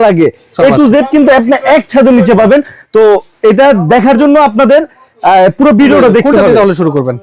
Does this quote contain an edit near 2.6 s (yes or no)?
no